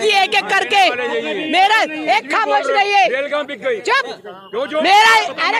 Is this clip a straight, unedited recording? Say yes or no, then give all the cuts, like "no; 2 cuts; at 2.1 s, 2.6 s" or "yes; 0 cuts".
yes; 0 cuts